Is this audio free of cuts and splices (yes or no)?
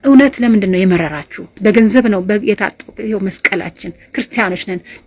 no